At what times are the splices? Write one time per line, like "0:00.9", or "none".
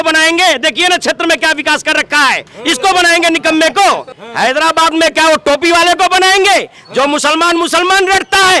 0:04.2